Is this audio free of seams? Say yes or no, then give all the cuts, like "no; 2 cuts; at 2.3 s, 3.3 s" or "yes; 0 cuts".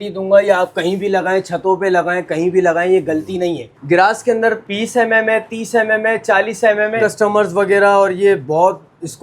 no; 3 cuts; at 3.7 s, 4.6 s, 7.0 s